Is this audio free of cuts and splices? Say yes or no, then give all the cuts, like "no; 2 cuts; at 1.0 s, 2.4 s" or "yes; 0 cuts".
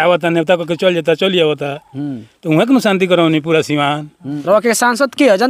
no; 1 cut; at 4.3 s